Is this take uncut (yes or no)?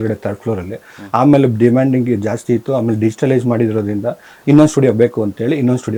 yes